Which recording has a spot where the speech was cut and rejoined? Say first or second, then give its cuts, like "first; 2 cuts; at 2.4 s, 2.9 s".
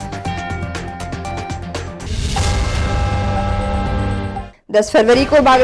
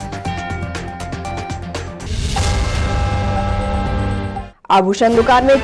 first; 1 cut; at 4.5 s